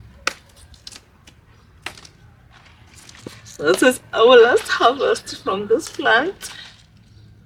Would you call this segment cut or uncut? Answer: uncut